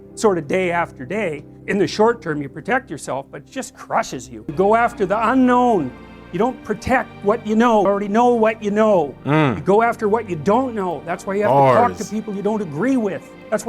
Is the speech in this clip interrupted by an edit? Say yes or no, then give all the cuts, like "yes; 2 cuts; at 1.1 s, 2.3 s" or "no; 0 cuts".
yes; 1 cut; at 4.5 s